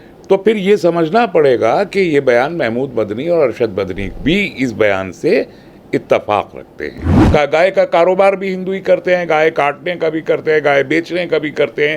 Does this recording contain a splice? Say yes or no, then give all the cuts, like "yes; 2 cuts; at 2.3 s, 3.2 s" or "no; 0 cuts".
yes; 1 cut; at 7.1 s